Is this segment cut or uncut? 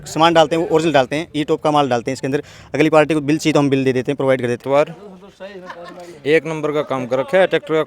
cut